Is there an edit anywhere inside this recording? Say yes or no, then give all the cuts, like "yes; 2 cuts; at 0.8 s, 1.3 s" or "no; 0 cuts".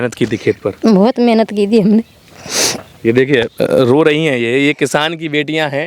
no; 0 cuts